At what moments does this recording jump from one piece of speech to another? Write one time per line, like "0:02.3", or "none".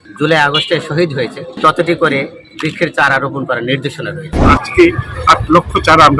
0:01.5
0:04.4